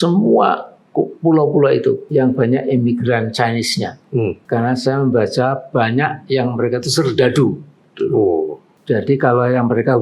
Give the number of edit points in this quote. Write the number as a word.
three